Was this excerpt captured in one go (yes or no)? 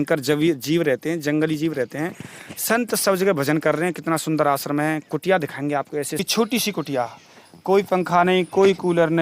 no